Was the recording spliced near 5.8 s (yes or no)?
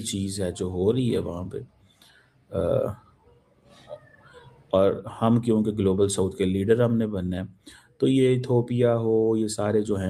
no